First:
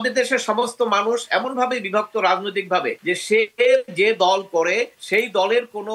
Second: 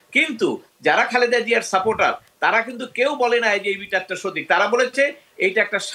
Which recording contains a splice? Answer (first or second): first